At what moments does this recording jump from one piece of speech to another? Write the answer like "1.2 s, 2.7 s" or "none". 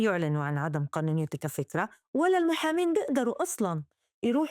none